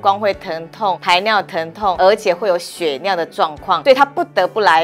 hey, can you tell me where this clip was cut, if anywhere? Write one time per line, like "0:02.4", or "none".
0:01.0
0:02.0
0:03.8